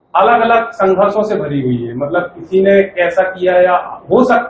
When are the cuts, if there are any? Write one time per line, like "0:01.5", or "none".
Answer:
none